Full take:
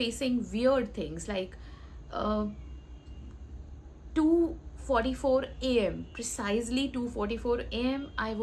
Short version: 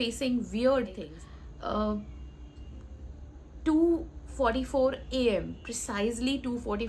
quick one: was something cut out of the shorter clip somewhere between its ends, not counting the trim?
yes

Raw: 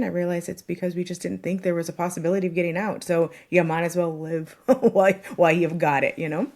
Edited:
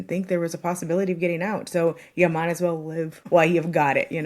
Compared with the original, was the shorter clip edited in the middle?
yes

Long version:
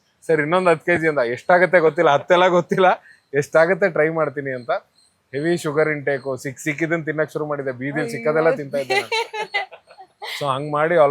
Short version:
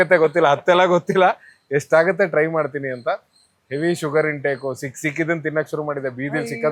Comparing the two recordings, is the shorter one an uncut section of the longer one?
yes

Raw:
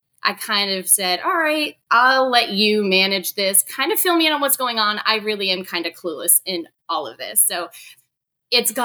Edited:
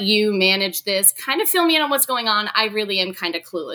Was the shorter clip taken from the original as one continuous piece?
yes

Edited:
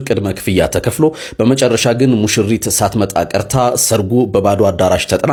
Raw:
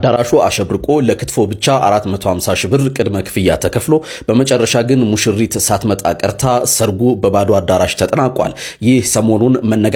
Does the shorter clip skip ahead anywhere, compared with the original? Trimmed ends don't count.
no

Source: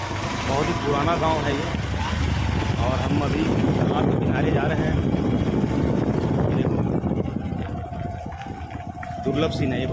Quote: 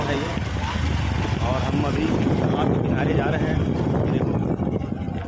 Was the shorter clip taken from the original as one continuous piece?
no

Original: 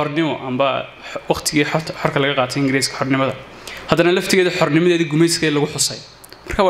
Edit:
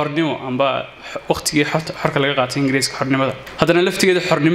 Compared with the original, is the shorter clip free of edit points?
no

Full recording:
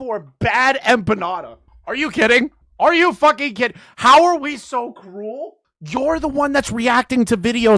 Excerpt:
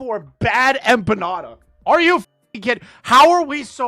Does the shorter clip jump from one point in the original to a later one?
yes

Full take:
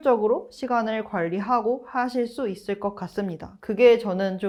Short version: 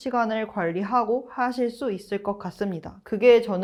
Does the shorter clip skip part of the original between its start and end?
no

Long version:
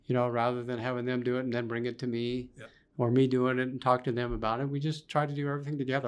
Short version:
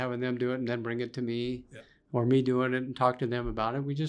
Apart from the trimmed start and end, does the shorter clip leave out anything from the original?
no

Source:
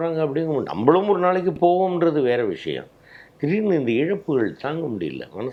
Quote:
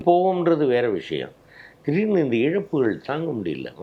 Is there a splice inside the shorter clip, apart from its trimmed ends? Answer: no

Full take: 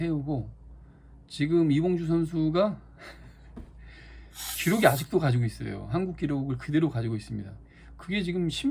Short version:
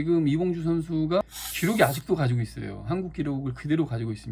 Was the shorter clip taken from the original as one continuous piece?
no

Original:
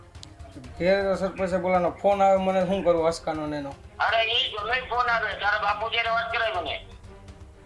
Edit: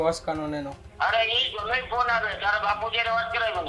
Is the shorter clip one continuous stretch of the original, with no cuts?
yes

